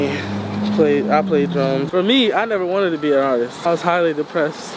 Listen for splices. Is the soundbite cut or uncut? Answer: cut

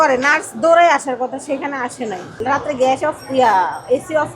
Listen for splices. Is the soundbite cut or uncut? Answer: cut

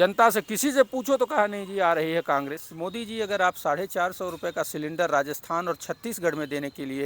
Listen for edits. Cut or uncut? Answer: cut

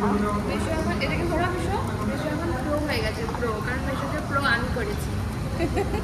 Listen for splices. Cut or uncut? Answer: uncut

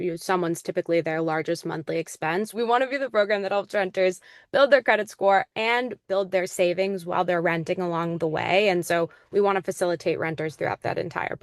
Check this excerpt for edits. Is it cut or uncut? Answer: cut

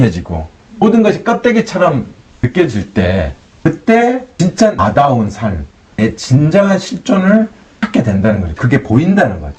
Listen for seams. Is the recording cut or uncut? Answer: uncut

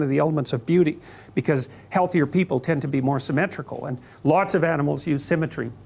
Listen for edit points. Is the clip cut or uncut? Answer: cut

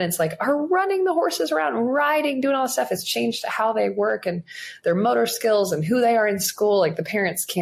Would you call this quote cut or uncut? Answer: uncut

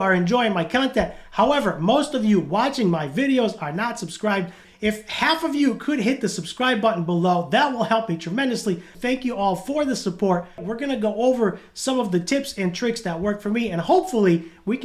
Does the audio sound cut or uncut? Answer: cut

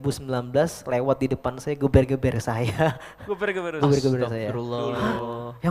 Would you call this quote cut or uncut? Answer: uncut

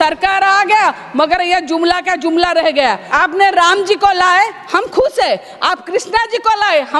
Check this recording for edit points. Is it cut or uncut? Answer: cut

